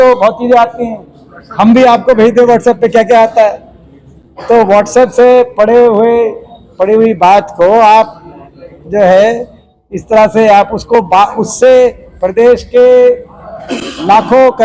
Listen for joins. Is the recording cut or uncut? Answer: uncut